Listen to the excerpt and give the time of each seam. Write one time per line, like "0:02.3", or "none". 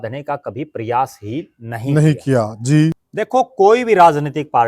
0:03.0